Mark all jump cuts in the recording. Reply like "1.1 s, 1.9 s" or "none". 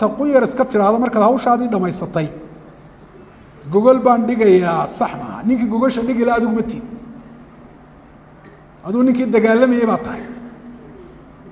none